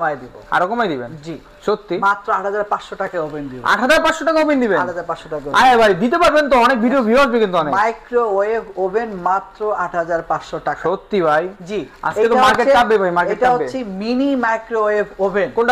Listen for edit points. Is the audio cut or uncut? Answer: uncut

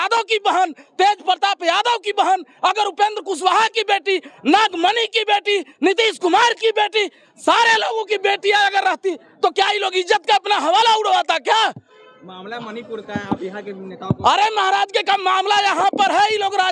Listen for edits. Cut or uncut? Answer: uncut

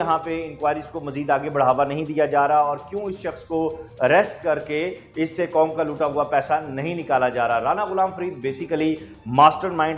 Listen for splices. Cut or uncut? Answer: uncut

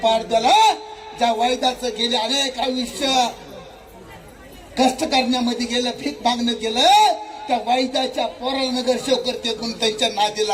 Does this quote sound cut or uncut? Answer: uncut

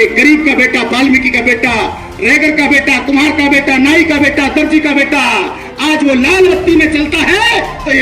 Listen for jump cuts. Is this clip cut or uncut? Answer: uncut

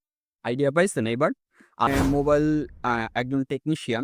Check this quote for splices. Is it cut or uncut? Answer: cut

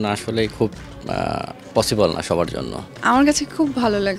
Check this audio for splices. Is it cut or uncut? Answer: cut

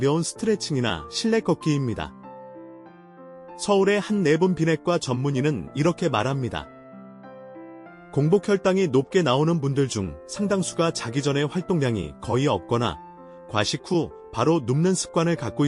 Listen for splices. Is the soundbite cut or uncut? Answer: cut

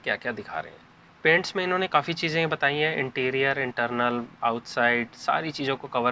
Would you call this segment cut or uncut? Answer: uncut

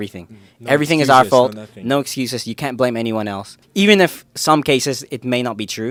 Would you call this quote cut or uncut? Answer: uncut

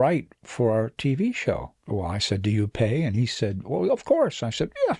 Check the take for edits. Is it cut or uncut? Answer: cut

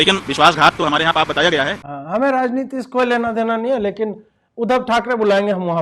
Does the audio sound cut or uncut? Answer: uncut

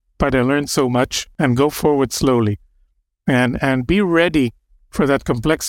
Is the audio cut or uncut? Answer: cut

